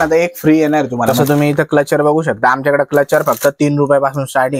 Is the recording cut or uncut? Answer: cut